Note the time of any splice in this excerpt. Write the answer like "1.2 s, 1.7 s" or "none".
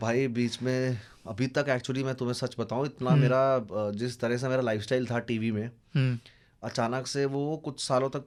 none